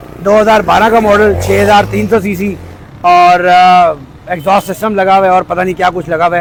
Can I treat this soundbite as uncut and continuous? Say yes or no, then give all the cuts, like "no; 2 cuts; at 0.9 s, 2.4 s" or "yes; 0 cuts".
yes; 0 cuts